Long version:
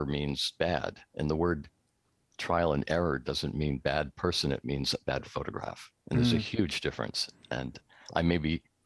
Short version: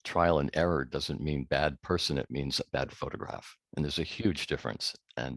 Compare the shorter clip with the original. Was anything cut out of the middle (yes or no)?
no